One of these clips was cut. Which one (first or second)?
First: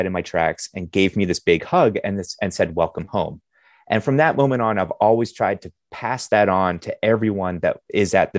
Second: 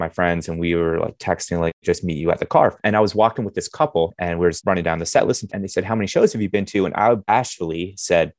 second